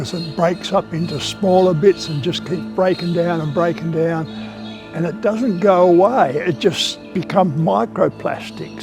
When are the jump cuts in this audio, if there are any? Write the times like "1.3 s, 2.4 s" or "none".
none